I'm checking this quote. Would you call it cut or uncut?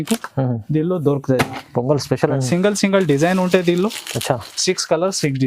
cut